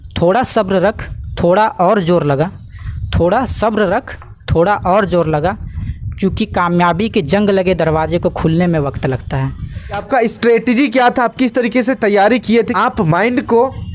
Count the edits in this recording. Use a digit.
2